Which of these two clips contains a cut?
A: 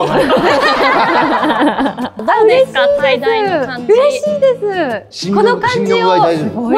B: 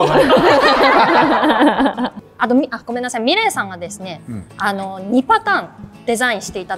A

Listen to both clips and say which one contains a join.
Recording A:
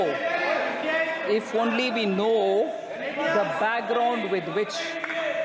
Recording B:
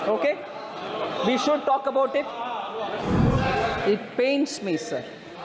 B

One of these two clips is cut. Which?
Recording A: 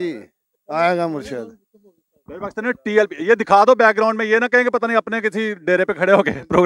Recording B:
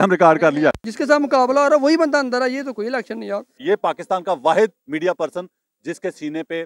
B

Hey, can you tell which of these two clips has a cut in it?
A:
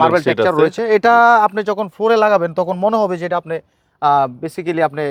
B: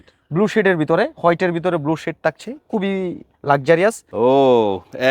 B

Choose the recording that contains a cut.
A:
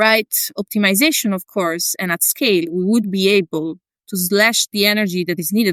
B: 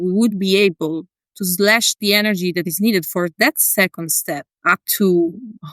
B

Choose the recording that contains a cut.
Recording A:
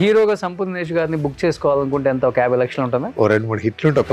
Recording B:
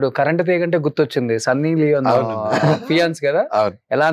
A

